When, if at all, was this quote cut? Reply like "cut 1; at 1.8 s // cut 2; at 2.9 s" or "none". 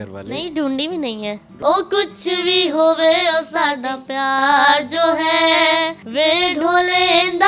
cut 1; at 1.6 s